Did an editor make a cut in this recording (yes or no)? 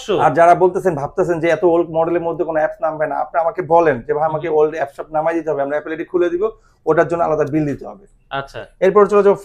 no